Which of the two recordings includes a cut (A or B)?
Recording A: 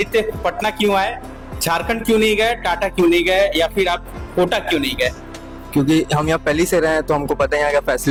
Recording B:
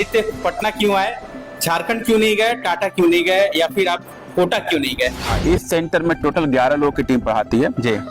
B